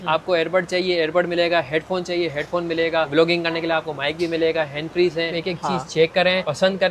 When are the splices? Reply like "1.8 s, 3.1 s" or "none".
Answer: 5.4 s

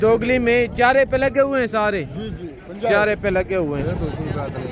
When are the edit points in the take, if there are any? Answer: 3.8 s

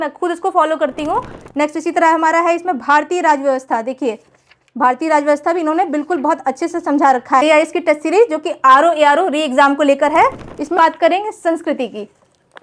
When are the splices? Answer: 1.4 s, 7.4 s, 10.8 s

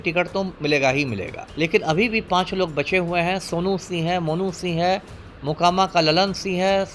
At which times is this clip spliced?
1.4 s

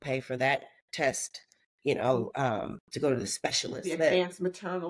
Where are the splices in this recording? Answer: 3.7 s

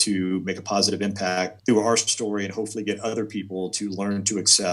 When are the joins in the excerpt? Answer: 1.5 s

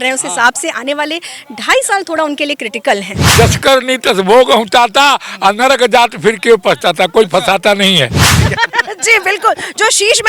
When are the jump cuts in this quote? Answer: 3.3 s, 8.4 s

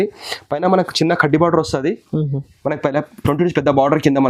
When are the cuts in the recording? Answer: none

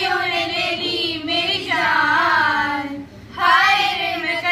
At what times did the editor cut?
none

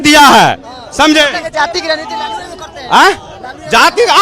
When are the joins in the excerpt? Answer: none

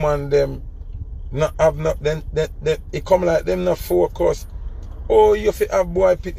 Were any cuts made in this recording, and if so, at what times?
none

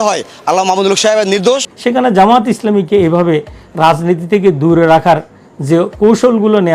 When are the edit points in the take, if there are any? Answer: 1.7 s

